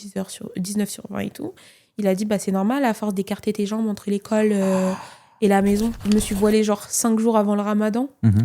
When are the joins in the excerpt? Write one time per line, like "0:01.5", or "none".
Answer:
0:06.0